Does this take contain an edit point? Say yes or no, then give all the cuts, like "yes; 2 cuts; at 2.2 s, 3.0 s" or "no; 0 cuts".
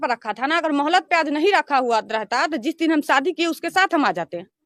no; 0 cuts